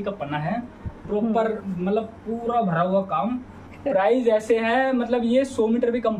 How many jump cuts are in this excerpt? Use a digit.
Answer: 1